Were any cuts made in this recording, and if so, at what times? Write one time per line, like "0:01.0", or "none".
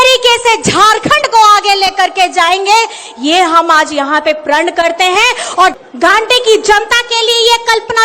0:05.8